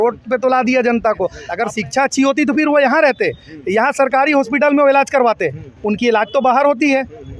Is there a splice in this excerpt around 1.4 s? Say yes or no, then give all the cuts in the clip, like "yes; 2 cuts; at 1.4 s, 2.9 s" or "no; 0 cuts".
yes; 1 cut; at 1.4 s